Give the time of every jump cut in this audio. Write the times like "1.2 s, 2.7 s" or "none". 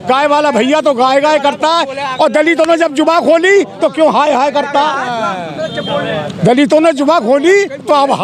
none